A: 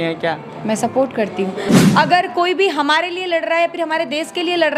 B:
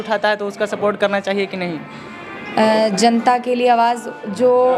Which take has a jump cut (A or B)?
A